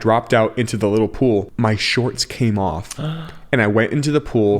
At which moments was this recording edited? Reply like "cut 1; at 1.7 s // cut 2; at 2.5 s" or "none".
cut 1; at 1.5 s